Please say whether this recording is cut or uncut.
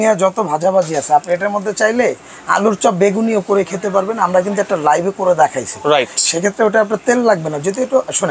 uncut